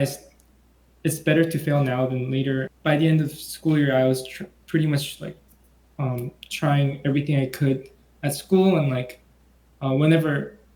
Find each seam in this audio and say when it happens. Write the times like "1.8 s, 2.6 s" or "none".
2.7 s